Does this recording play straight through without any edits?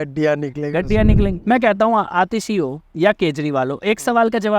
no; 1 cut; at 1.4 s

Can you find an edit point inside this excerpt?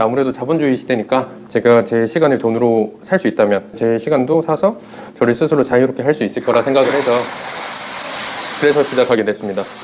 yes; 2 cuts; at 1.4 s, 3.7 s

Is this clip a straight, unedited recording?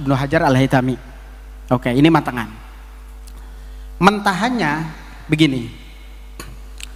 yes; 0 cuts

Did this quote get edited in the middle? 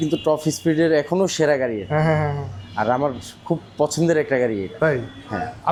no; 0 cuts

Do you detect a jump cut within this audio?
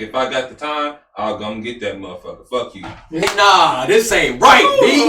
yes; 1 cut; at 3.3 s

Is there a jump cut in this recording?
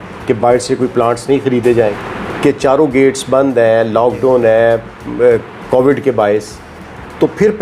yes; 1 cut; at 2.0 s

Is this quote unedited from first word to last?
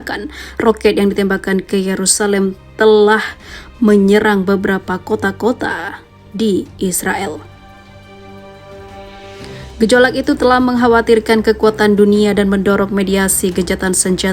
no; 2 cuts; at 7.5 s, 9.7 s

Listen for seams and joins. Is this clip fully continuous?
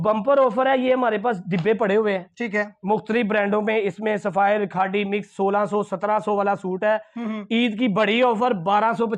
yes; 0 cuts

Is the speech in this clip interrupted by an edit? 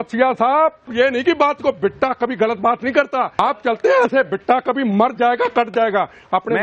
yes; 2 cuts; at 0.9 s, 3.3 s

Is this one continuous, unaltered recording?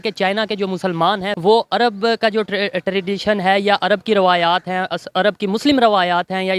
no; 1 cut; at 1.3 s

